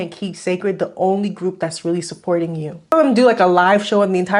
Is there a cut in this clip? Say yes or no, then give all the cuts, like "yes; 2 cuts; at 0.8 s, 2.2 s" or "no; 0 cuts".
yes; 1 cut; at 2.9 s